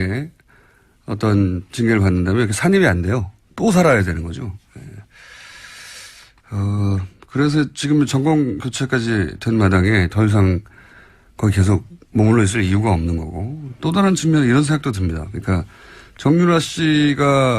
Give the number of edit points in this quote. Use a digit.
1